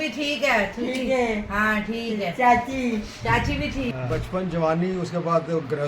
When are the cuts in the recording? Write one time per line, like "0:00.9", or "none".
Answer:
0:03.9